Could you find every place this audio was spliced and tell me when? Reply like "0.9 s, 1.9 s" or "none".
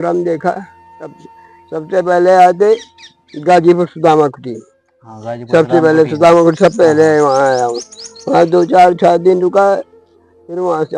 none